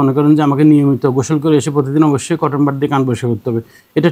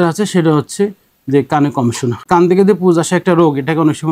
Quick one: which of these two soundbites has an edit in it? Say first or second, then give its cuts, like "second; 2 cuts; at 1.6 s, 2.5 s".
second; 1 cut; at 2.2 s